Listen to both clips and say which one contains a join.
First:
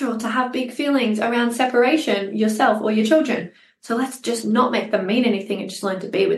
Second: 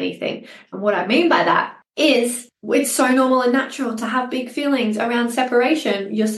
second; 2 cuts; at 1.8 s, 2.5 s

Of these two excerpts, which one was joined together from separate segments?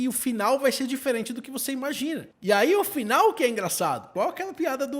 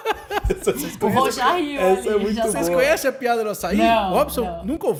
first; 2 cuts; at 2.3 s, 4.1 s

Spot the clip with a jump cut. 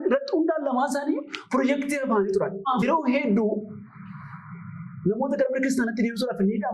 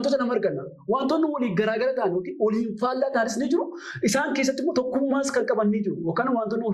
first; 1 cut; at 2.8 s

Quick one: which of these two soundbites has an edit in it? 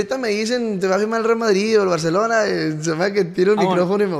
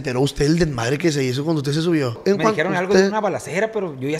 second; 1 cut; at 2.1 s

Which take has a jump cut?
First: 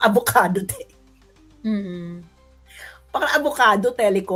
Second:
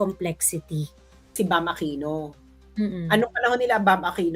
second; 1 cut; at 1.3 s

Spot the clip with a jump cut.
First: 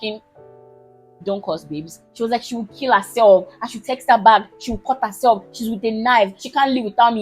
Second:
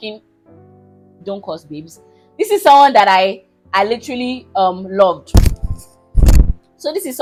first; 1 cut; at 2.0 s

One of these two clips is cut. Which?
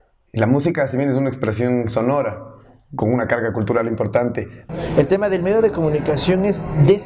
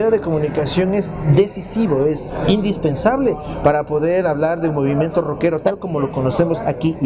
first; 1 cut; at 4.6 s

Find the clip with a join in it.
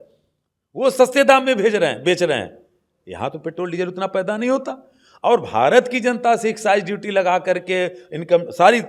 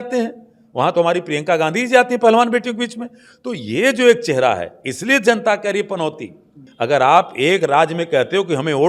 second; 1 cut; at 6.6 s

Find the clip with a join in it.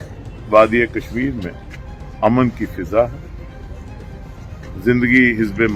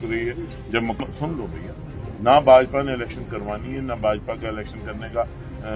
second; 1 cut; at 1.0 s

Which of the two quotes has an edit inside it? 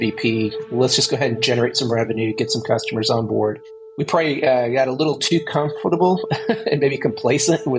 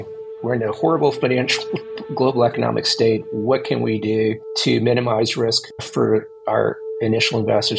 first; 1 cut; at 3.9 s

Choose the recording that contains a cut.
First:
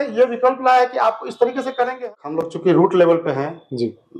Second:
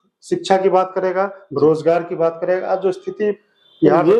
first; 1 cut; at 2.0 s

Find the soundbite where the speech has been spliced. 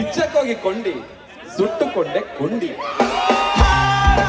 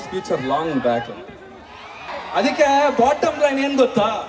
second; 1 cut; at 2.1 s

